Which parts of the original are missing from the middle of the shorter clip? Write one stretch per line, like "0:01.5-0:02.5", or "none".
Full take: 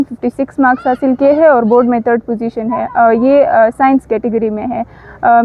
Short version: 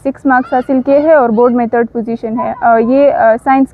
none